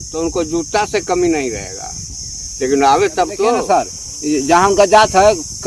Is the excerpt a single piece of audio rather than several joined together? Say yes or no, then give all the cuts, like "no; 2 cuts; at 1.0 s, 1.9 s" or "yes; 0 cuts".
no; 1 cut; at 3.6 s